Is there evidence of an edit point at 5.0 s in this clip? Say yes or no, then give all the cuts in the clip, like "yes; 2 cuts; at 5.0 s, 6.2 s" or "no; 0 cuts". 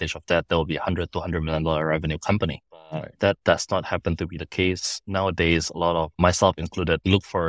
yes; 1 cut; at 5.0 s